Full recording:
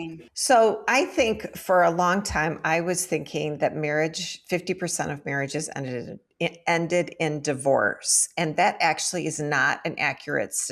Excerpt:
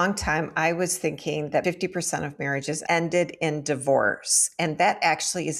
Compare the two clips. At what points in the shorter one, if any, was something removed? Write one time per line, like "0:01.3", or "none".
0:01.6
0:02.8